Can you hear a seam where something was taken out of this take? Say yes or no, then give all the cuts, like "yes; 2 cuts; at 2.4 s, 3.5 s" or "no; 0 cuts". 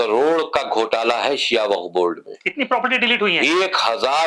no; 0 cuts